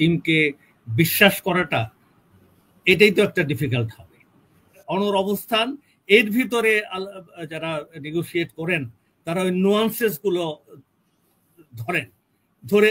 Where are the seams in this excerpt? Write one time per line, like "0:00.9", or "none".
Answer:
0:04.8